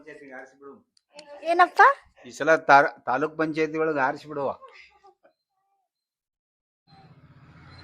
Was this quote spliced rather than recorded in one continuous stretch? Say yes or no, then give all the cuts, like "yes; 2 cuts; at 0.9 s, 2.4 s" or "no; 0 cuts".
yes; 1 cut; at 5.1 s